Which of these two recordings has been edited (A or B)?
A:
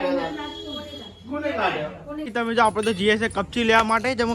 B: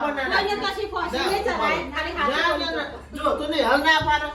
A